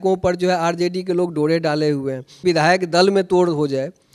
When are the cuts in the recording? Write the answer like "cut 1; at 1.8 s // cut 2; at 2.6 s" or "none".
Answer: cut 1; at 2.4 s